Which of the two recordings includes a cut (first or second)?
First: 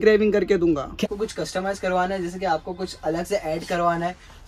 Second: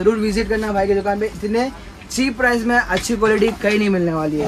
first